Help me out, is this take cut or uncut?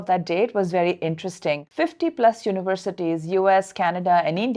cut